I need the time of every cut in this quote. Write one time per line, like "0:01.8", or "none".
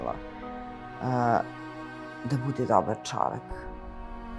none